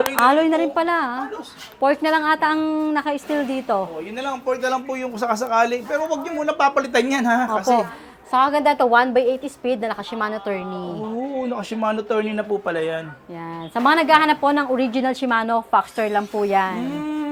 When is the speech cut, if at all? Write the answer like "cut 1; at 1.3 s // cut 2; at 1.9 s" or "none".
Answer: none